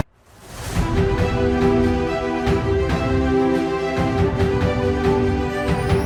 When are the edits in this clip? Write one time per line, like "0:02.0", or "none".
none